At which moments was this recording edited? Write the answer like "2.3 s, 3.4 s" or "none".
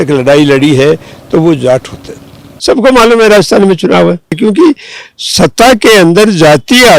2.5 s, 4.4 s